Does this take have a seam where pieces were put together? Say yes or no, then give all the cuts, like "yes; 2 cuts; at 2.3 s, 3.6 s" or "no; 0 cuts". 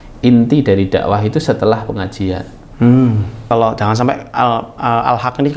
yes; 1 cut; at 3.5 s